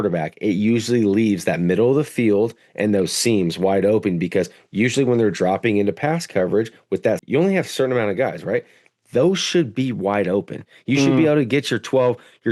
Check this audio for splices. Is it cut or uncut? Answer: uncut